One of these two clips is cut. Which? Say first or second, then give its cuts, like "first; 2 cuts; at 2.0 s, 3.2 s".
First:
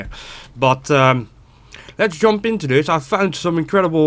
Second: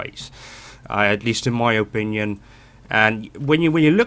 second; 1 cut; at 1.9 s